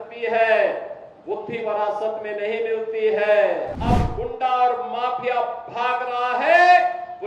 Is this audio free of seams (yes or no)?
no